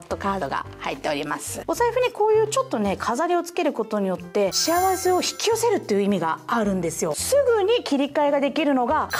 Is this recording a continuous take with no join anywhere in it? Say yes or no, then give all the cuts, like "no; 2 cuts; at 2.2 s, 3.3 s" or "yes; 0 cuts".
no; 3 cuts; at 1.6 s, 4.5 s, 7.2 s